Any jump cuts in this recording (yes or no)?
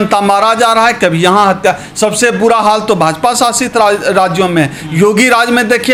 no